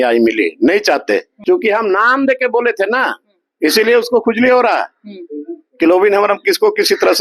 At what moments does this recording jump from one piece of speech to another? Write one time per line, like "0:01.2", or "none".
0:01.3